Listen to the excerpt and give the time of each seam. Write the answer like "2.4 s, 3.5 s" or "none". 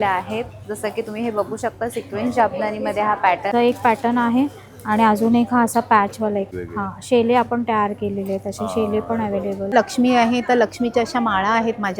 3.5 s, 6.6 s, 9.7 s